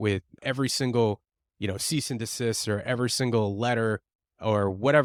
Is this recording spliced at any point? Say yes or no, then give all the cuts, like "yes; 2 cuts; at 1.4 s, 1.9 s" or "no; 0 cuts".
no; 0 cuts